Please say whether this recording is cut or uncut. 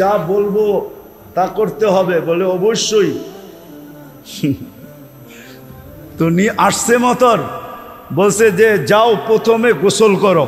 cut